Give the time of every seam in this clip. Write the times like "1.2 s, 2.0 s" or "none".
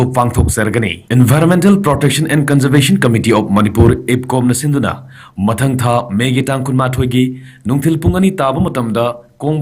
0.9 s